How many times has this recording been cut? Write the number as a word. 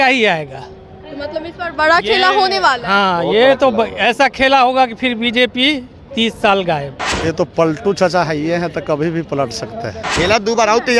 two